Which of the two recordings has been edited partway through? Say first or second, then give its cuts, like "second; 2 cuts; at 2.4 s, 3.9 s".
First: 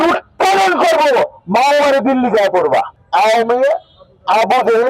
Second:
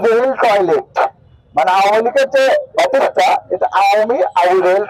first; 1 cut; at 3.0 s